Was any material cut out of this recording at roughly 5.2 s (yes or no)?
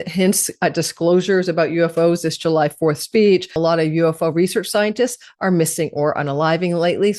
no